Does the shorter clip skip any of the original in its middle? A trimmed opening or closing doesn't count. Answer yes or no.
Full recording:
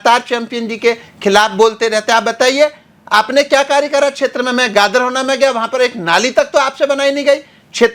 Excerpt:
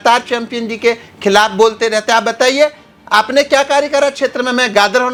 no